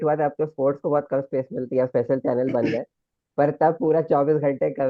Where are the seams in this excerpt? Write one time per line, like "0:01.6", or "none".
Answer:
none